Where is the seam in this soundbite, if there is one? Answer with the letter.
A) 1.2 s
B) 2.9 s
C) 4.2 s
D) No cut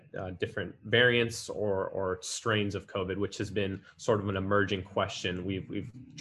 D